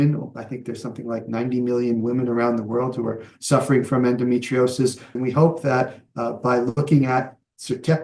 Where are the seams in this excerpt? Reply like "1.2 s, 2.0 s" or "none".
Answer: 5.1 s